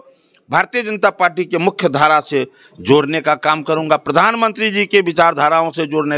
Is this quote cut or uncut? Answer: uncut